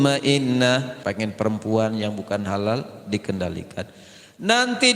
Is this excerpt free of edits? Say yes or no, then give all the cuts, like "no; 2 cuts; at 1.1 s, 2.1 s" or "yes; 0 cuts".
no; 1 cut; at 1.0 s